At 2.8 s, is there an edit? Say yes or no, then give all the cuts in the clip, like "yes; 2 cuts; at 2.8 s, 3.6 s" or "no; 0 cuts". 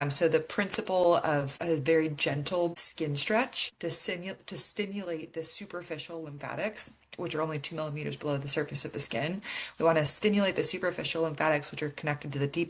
yes; 3 cuts; at 1.5 s, 2.8 s, 3.6 s